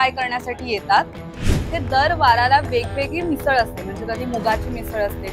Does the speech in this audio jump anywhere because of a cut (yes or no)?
yes